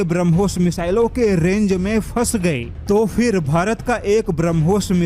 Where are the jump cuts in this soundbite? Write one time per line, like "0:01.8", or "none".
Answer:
none